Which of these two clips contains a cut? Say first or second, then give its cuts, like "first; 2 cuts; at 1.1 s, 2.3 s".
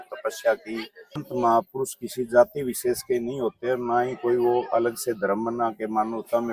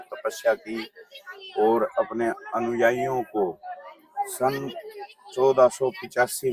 first; 1 cut; at 1.3 s